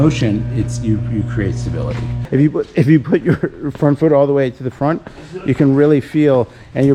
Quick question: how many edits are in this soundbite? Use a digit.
1